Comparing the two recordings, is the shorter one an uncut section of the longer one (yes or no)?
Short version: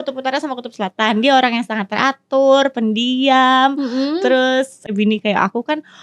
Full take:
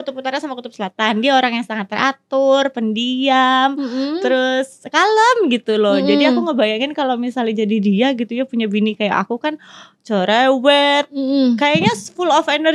no